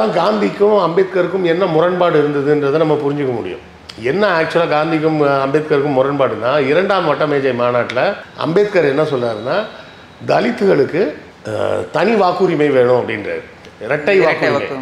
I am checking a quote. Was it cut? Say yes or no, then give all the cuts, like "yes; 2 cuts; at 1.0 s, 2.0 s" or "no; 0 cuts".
no; 0 cuts